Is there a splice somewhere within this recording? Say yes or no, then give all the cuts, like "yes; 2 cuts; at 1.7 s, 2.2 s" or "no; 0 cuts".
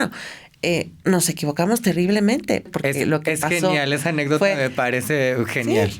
yes; 1 cut; at 2.7 s